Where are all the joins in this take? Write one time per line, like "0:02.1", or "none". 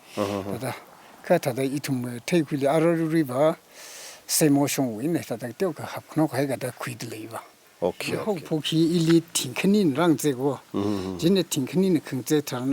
0:08.4